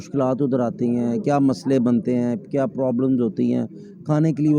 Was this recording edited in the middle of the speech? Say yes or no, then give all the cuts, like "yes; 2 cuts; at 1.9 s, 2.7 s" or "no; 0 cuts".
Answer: no; 0 cuts